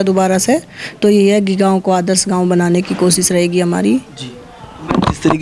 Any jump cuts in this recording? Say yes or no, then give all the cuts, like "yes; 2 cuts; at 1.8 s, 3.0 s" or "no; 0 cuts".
no; 0 cuts